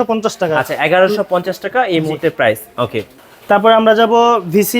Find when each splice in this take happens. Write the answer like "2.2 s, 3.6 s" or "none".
3.1 s